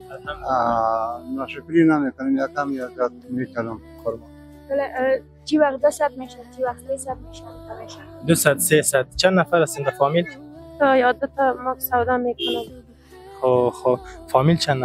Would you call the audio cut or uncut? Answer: cut